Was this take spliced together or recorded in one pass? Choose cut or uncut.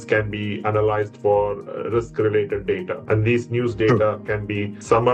cut